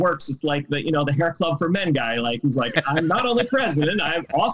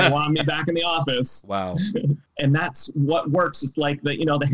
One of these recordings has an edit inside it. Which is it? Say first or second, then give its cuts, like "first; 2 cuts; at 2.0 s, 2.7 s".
second; 1 cut; at 2.3 s